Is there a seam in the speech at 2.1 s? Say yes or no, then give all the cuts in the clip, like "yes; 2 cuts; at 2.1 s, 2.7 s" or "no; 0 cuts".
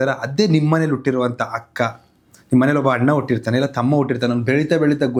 no; 0 cuts